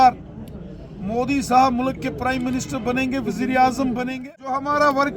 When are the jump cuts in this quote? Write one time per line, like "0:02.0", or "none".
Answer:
0:04.1